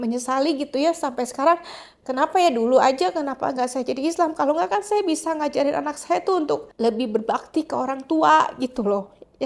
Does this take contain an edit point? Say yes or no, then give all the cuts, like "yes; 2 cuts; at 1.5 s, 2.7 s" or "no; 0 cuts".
no; 0 cuts